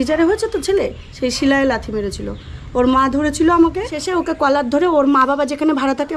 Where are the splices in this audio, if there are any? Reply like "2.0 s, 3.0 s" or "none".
4.1 s